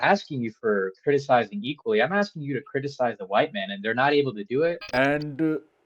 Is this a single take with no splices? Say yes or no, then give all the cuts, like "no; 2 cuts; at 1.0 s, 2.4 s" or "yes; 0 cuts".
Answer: no; 1 cut; at 4.8 s